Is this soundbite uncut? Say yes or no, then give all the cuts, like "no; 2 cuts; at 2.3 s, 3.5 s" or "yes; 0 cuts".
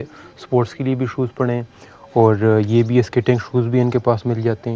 yes; 0 cuts